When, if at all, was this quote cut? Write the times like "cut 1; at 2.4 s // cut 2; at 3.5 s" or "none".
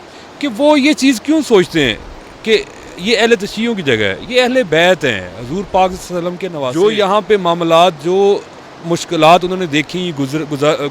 none